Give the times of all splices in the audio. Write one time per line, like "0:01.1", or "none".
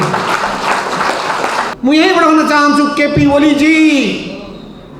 0:01.7